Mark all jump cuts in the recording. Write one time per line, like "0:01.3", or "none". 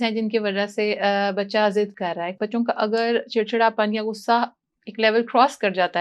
0:02.4